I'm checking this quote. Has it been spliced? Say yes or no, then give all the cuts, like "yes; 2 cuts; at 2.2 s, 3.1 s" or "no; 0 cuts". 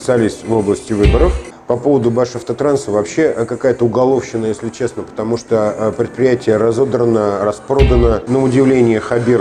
yes; 2 cuts; at 1.5 s, 8.2 s